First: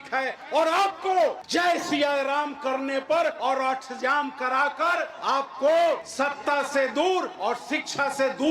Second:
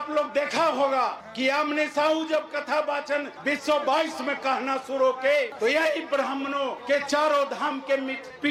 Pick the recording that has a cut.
first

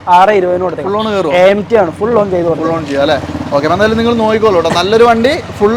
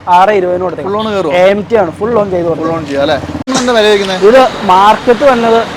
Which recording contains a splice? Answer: second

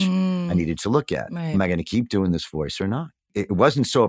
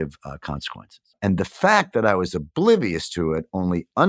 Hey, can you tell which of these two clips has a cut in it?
first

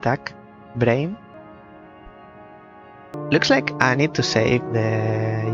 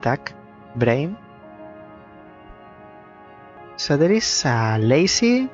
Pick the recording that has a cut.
first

